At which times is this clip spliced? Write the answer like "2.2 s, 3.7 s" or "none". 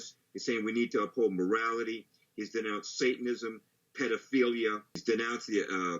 5.0 s